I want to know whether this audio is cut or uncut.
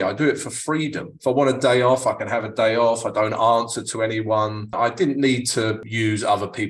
cut